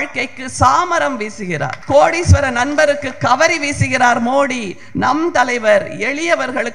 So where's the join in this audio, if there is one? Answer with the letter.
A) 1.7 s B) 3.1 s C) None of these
A